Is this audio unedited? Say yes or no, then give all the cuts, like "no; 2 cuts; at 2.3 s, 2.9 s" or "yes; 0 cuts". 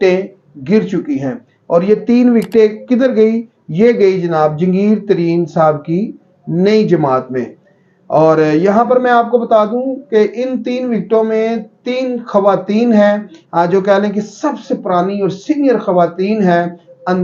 yes; 0 cuts